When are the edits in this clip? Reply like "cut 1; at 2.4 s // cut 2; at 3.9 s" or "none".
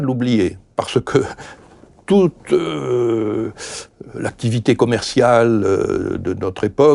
none